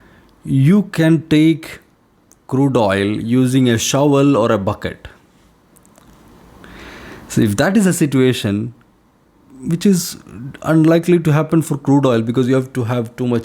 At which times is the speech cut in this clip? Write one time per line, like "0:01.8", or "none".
none